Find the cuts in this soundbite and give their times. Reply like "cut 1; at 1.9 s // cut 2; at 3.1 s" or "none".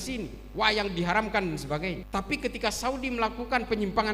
cut 1; at 2.0 s

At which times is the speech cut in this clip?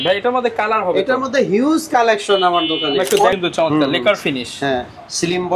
cut 1; at 3.4 s

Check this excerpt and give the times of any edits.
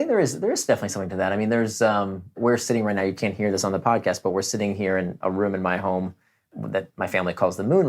cut 1; at 2.4 s // cut 2; at 5.2 s // cut 3; at 6.5 s

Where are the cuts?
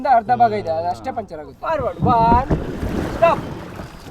cut 1; at 1.6 s

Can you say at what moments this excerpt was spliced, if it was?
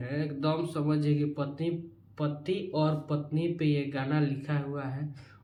none

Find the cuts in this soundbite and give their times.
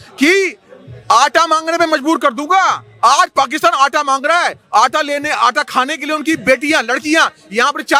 none

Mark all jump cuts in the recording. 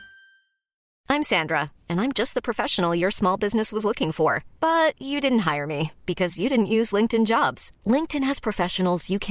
cut 1; at 1.0 s

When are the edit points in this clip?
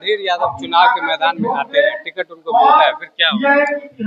none

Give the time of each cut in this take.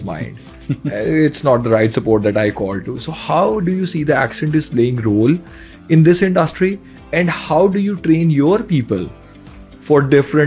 none

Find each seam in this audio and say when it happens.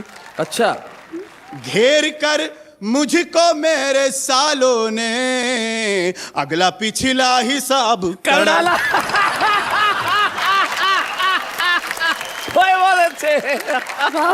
none

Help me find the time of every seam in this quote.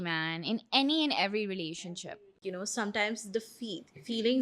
cut 1; at 2.0 s

